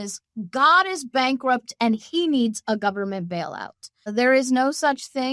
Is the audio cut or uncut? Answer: cut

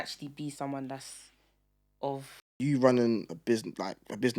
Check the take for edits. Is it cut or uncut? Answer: cut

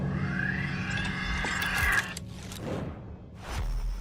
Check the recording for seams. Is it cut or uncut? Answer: uncut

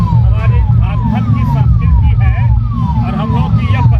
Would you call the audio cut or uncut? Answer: uncut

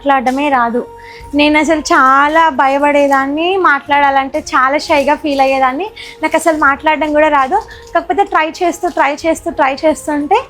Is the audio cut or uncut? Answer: uncut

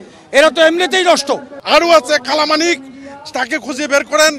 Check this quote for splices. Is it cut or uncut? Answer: cut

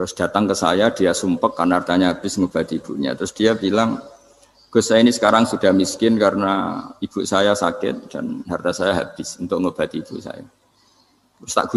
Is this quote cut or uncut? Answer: uncut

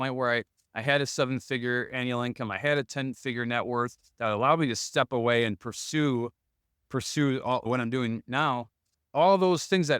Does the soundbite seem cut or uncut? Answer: cut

